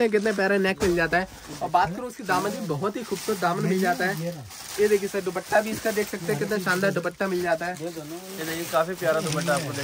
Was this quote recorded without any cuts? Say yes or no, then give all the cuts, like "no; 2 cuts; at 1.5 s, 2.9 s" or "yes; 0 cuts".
yes; 0 cuts